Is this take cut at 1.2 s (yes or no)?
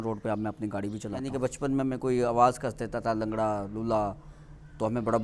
yes